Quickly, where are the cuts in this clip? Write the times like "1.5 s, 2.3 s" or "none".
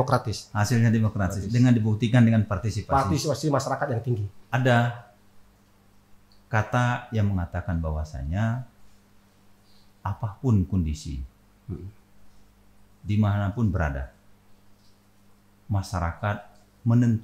4.3 s